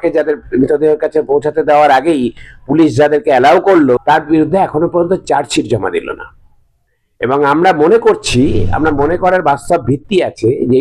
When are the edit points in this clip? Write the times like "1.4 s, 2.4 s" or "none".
4.0 s